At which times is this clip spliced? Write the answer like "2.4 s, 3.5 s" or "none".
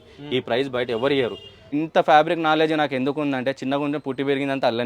1.7 s